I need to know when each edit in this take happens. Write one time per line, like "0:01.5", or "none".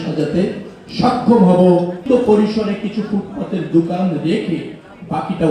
0:02.1

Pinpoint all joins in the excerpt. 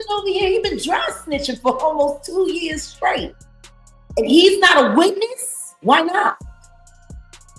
0:06.3

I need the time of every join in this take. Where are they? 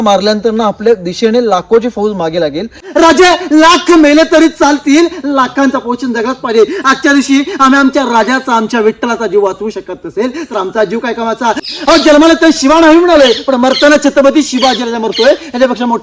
0:02.8
0:11.6

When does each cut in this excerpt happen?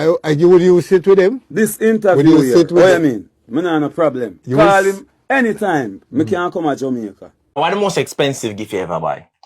0:07.6

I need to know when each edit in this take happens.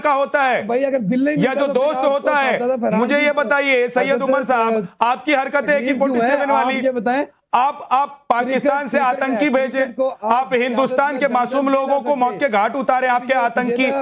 0:11.5

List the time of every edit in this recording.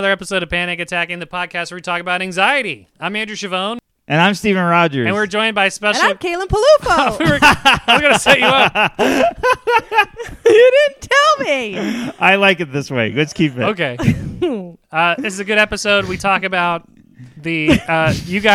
0:03.9

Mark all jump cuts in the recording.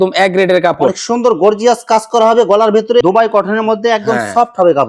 0:03.0

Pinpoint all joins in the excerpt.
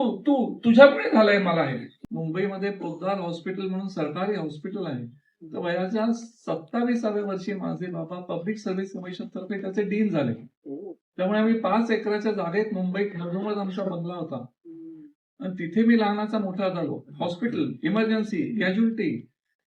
0:01.9

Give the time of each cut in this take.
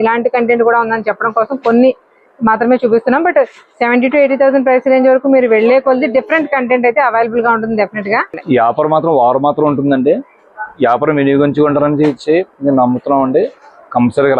0:08.3

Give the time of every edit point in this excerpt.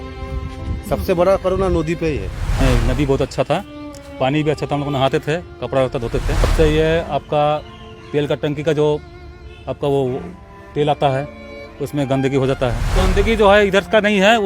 0:02.6
0:06.5
0:13.0

